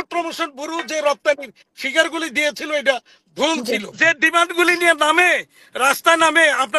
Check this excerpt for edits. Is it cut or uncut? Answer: cut